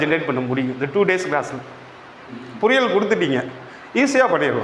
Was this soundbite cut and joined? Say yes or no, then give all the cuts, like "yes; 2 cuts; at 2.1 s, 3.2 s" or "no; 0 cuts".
no; 0 cuts